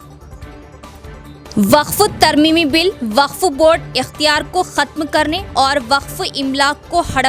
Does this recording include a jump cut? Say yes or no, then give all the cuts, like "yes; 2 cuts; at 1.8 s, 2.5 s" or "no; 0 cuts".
yes; 1 cut; at 1.2 s